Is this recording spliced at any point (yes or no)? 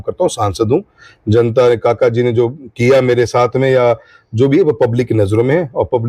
no